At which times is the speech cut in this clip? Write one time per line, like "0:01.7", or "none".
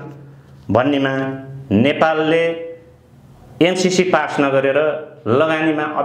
none